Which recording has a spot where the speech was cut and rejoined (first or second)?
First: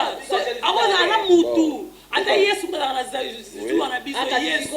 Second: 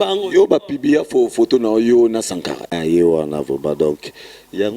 second